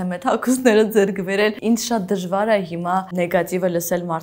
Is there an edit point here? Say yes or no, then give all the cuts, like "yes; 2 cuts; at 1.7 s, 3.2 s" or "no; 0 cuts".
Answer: yes; 2 cuts; at 1.6 s, 3.1 s